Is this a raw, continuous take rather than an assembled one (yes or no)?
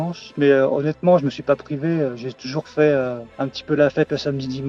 yes